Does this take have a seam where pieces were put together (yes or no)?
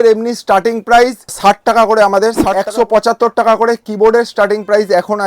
yes